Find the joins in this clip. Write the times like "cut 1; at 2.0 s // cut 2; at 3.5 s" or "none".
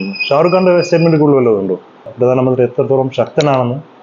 cut 1; at 2.0 s

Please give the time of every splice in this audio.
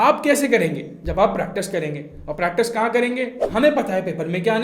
cut 1; at 3.4 s

